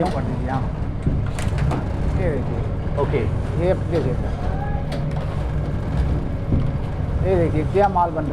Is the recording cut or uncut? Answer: uncut